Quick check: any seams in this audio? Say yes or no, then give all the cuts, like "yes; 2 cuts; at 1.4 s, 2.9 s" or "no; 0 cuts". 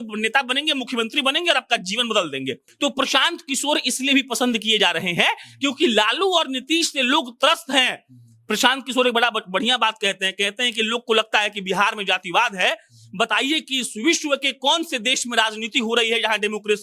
yes; 1 cut; at 2.6 s